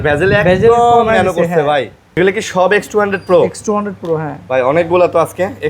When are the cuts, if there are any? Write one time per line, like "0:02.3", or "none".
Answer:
0:02.2

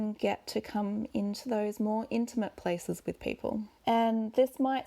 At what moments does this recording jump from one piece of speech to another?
0:03.7

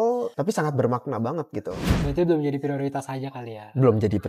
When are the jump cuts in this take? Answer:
0:01.9

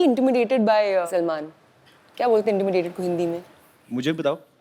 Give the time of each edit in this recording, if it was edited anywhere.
0:01.1

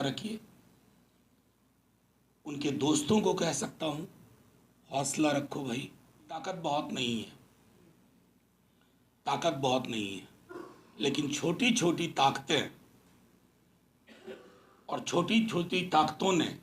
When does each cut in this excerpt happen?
0:06.4

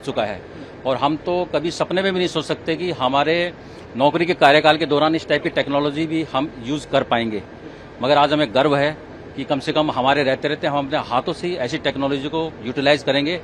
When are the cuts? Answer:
none

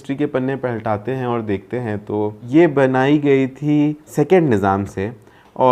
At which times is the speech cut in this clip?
0:02.4
0:04.1

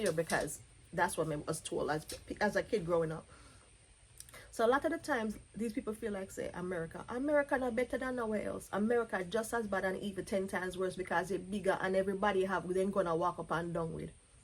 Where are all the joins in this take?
none

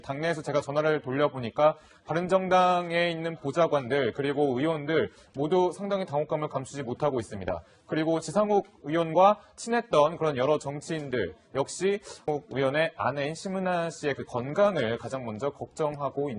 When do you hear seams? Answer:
none

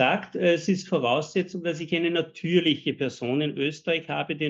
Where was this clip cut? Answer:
none

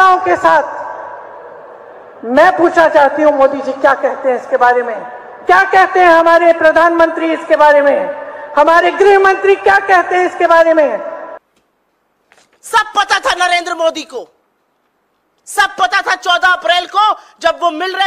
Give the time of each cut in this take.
0:11.4

